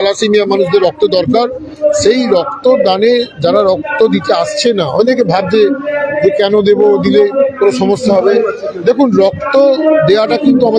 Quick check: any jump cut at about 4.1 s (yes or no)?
no